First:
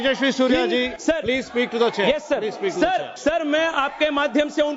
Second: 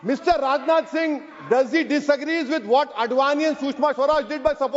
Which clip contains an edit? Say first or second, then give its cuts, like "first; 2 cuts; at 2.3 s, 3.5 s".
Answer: first; 2 cuts; at 0.9 s, 3.1 s